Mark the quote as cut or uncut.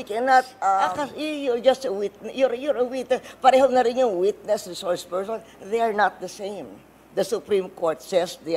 cut